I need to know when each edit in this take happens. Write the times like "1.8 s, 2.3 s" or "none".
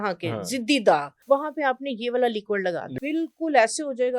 1.1 s, 3.0 s